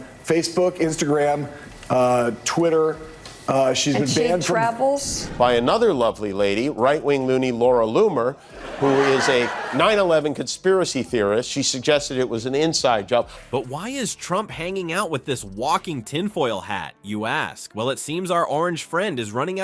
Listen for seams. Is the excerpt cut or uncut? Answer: uncut